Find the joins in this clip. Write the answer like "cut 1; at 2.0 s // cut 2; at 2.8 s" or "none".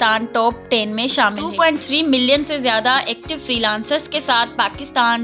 cut 1; at 1.4 s